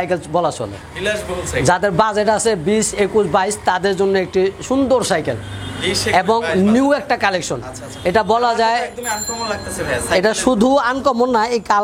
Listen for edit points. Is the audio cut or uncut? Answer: uncut